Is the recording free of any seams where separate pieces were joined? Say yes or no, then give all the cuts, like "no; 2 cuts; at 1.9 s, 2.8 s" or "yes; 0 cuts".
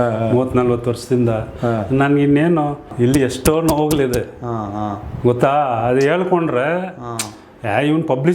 no; 1 cut; at 2.9 s